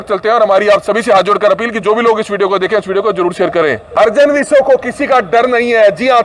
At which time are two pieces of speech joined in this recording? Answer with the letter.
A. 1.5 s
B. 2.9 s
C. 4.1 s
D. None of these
C